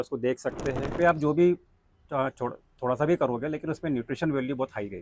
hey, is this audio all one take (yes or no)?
no